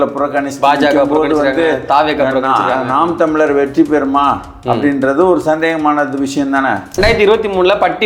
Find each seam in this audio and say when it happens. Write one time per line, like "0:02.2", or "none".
0:07.0